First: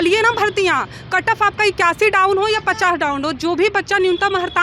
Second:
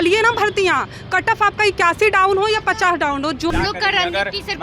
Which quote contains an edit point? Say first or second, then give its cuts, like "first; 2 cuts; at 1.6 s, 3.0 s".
second; 1 cut; at 3.5 s